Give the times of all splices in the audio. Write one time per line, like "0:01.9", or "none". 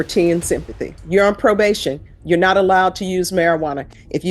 0:00.9